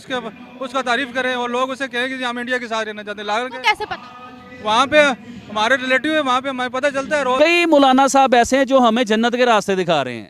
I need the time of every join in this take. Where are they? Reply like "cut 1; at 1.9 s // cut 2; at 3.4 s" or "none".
cut 1; at 7.4 s